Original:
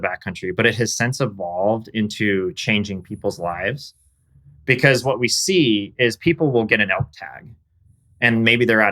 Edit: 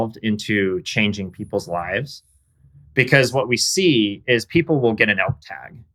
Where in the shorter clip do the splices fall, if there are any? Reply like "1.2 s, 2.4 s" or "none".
none